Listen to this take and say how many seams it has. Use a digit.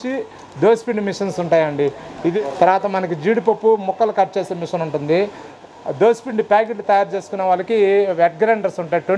2